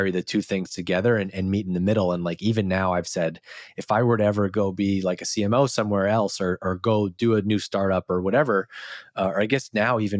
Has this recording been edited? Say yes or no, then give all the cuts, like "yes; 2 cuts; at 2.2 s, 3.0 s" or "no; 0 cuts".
no; 0 cuts